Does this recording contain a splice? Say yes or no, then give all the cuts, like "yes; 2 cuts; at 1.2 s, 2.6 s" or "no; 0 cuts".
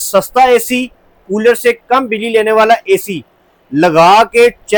no; 0 cuts